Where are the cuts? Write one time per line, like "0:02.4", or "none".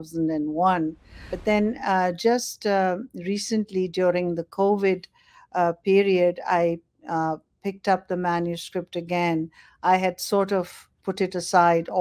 0:01.3